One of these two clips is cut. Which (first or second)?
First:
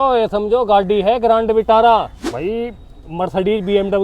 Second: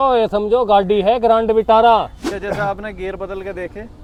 first